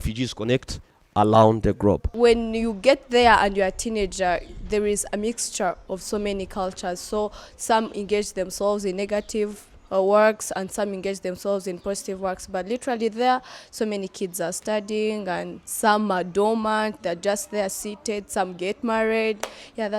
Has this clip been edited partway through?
yes; 1 cut; at 2.1 s

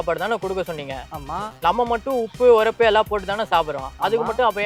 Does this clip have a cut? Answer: no; 0 cuts

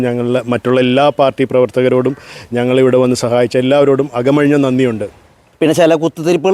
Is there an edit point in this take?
yes; 1 cut; at 5.4 s

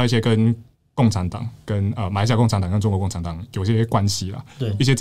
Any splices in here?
no; 0 cuts

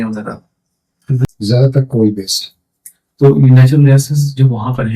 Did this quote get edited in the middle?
yes; 1 cut; at 1.2 s

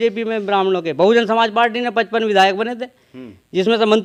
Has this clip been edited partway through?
no; 0 cuts

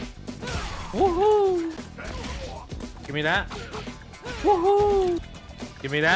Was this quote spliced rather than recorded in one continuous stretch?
yes; 1 cut; at 1.8 s

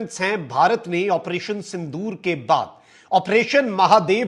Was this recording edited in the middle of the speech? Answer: no; 0 cuts

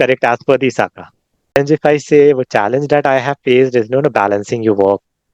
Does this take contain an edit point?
yes; 1 cut; at 1.5 s

